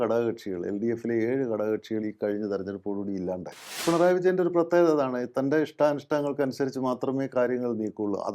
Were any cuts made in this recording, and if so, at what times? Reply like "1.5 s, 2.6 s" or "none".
3.8 s